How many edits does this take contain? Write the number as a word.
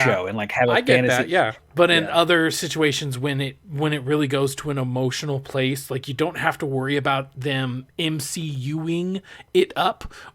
one